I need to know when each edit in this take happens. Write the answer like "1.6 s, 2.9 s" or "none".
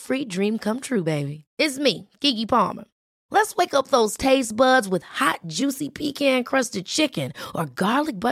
none